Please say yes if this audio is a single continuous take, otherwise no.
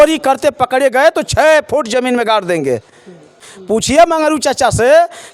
no